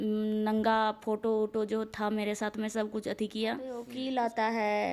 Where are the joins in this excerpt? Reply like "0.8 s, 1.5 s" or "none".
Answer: 3.9 s